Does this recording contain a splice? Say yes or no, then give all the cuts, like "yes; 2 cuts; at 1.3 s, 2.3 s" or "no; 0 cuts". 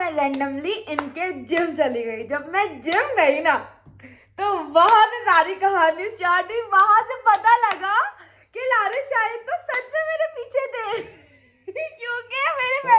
no; 0 cuts